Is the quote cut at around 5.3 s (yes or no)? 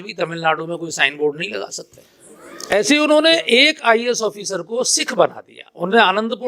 no